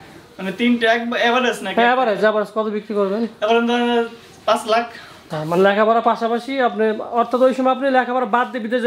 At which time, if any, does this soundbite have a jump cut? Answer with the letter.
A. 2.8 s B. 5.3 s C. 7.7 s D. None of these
B